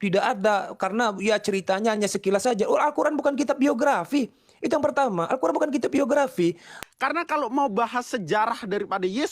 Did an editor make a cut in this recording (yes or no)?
yes